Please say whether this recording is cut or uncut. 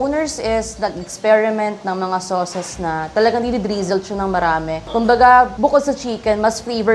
uncut